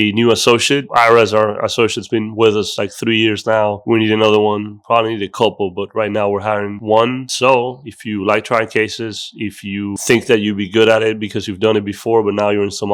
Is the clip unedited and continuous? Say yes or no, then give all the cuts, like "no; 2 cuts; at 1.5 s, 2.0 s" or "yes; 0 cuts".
yes; 0 cuts